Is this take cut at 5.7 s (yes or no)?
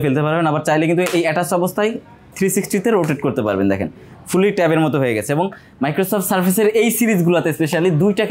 no